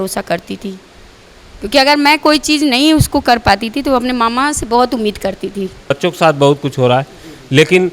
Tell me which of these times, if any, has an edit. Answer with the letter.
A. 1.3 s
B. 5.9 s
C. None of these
B